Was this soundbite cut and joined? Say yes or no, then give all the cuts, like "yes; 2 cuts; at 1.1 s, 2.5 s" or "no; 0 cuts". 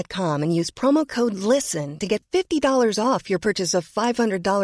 no; 0 cuts